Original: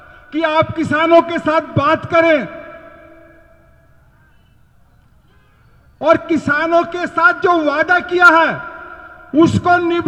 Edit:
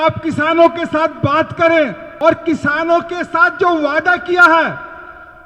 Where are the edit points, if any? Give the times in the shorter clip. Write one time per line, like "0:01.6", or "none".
0:02.0